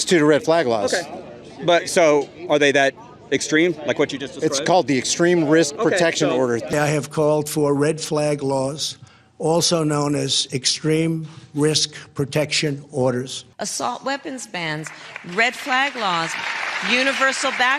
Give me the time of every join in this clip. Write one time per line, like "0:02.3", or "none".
none